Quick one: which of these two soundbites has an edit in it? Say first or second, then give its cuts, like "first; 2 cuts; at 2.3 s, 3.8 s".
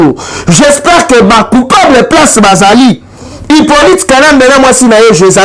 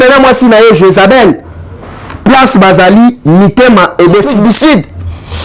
second; 1 cut; at 4.3 s